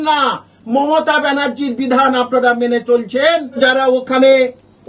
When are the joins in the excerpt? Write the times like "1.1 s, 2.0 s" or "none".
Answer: 3.6 s